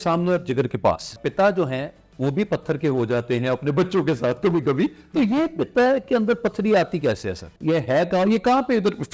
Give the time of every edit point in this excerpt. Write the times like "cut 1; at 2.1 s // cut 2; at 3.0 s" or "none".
cut 1; at 1.2 s // cut 2; at 7.5 s